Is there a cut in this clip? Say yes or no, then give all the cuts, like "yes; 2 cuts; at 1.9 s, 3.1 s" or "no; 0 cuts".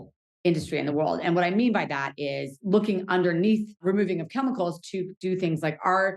yes; 2 cuts; at 2.5 s, 3.8 s